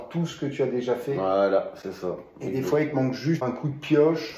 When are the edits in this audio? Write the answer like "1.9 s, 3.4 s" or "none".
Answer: 3.4 s